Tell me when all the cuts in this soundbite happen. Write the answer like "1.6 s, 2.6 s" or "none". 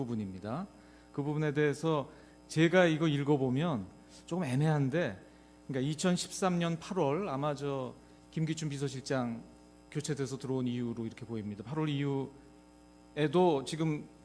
none